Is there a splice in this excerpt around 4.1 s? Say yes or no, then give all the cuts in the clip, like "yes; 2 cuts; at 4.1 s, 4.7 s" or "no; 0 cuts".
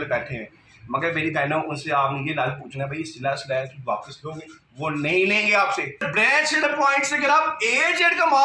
no; 1 cut; at 6.1 s